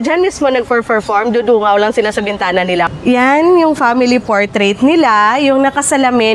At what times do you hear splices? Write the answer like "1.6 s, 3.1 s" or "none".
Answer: 2.9 s